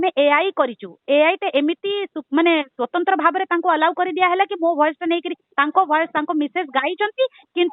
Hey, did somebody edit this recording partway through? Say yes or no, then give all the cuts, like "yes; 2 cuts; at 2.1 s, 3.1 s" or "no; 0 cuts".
no; 0 cuts